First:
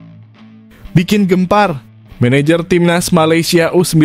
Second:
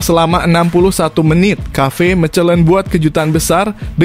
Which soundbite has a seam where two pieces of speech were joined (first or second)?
first